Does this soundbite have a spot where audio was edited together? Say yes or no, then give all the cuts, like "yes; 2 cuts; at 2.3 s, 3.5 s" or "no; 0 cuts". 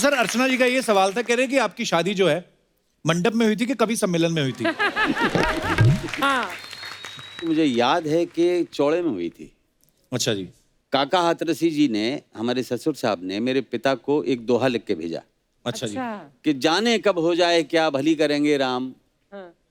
no; 0 cuts